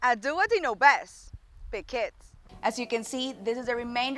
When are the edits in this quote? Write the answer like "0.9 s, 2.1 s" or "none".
2.3 s